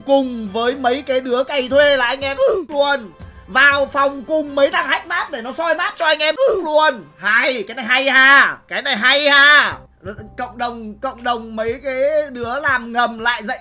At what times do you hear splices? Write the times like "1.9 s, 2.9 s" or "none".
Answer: none